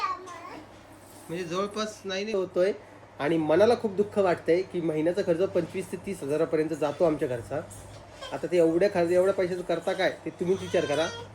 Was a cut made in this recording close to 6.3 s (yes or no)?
no